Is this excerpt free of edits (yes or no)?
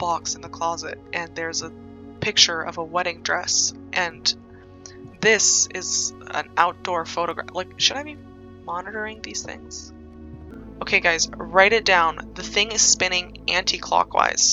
no